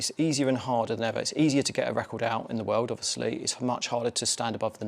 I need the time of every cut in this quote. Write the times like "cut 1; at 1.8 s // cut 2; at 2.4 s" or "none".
none